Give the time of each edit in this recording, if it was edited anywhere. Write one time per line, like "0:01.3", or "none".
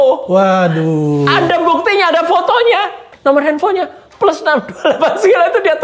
0:03.1